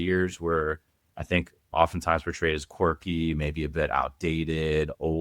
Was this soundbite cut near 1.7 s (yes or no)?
yes